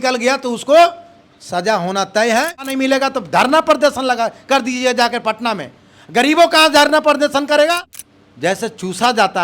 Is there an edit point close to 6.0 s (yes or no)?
no